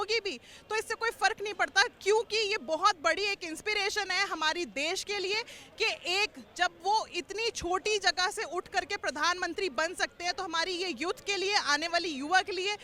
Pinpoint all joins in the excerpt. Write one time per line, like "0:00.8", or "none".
none